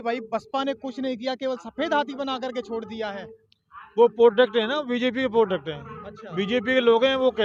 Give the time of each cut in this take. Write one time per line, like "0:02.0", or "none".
none

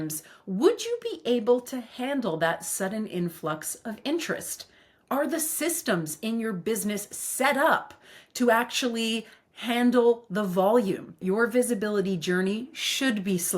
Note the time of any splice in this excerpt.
0:11.1

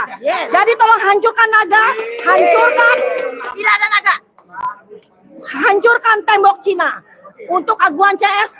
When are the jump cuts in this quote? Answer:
none

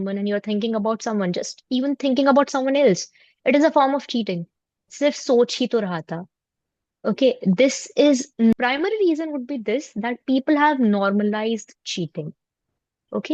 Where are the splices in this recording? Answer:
0:08.5

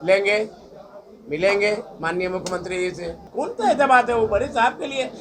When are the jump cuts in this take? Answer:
0:03.2

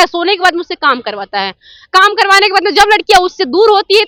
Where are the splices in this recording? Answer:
none

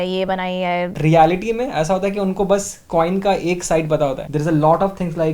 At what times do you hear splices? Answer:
0:01.0

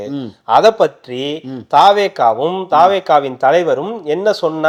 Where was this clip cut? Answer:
none

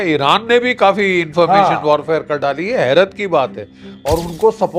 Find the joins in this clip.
none

